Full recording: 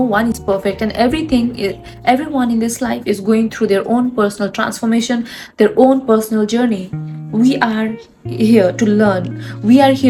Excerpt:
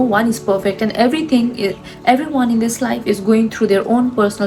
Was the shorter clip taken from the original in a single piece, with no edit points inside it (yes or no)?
yes